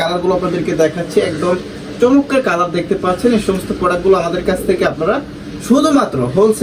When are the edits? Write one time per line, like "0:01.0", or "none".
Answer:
none